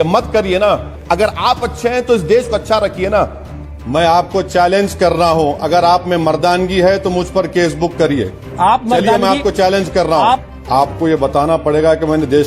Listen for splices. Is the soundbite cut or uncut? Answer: cut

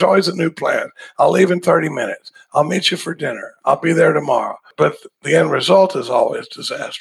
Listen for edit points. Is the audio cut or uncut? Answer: cut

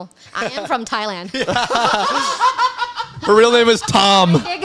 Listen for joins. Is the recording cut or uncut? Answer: uncut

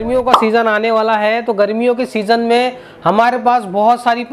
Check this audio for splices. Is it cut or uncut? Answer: uncut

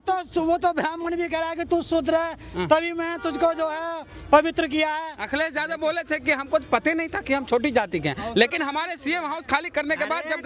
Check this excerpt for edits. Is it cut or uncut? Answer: uncut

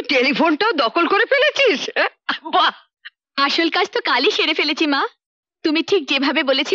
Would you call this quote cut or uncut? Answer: uncut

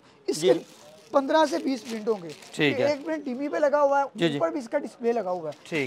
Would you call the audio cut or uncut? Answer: uncut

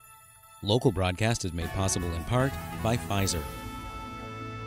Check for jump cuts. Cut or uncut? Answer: cut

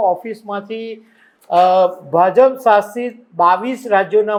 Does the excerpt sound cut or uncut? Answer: uncut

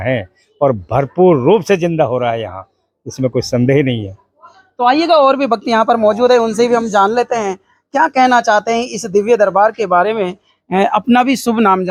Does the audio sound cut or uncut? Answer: uncut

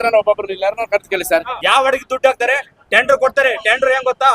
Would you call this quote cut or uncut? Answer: cut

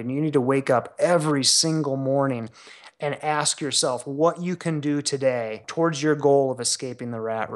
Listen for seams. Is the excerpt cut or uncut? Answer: cut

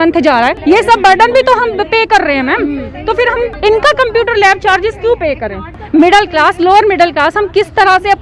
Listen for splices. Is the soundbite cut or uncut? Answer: uncut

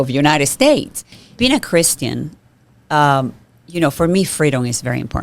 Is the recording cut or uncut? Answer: cut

